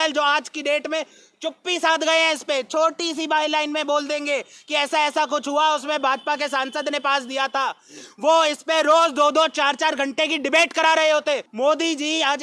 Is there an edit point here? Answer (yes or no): yes